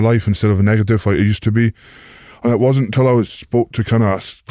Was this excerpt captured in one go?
yes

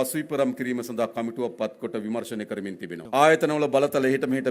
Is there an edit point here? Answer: yes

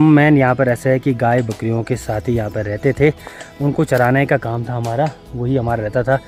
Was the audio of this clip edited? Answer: no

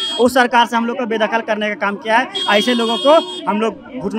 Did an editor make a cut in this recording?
no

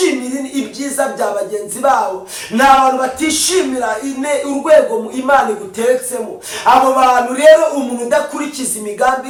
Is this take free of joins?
yes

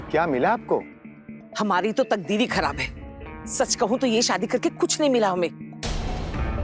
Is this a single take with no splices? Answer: yes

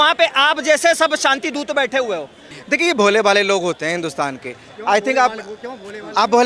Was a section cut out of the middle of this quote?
yes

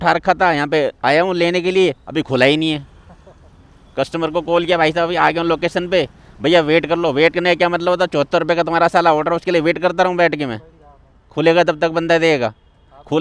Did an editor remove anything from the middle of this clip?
no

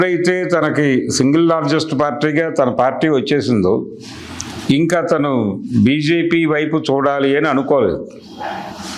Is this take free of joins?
yes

